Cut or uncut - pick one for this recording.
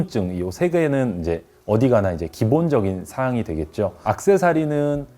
cut